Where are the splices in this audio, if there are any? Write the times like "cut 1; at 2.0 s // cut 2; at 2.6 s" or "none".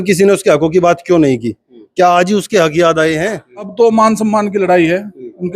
cut 1; at 3.7 s